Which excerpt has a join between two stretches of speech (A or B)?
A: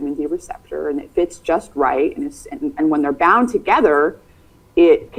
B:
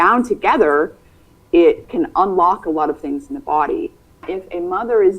B